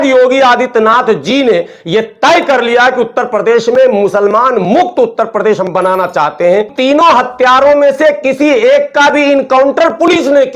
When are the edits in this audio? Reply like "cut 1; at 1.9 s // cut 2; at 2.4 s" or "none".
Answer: cut 1; at 6.7 s

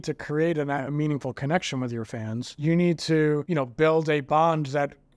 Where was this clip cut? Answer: cut 1; at 2.5 s // cut 2; at 3.5 s

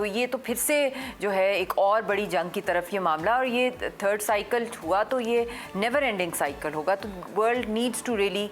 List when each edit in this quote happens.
none

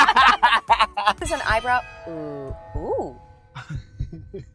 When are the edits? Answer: cut 1; at 1.2 s

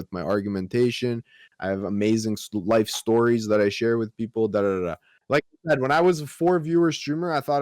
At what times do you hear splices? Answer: cut 1; at 5.1 s

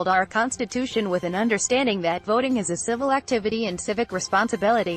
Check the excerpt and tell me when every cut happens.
none

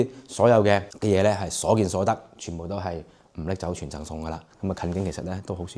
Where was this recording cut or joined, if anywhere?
cut 1; at 0.9 s // cut 2; at 4.5 s

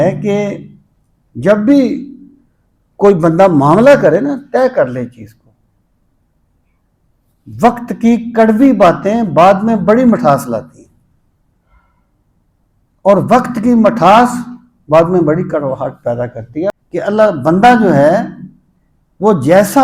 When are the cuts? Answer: cut 1; at 16.7 s

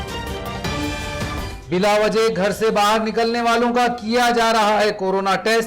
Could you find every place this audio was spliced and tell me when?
cut 1; at 1.4 s

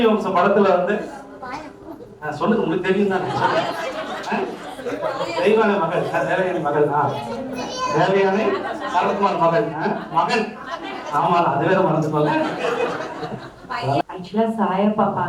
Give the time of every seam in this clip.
cut 1; at 14.0 s

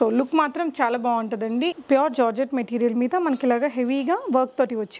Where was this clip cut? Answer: cut 1; at 1.8 s

